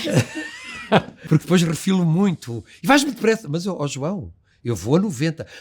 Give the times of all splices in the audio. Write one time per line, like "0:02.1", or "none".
0:01.2